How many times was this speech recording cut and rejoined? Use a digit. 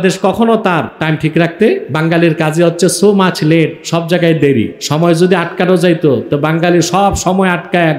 4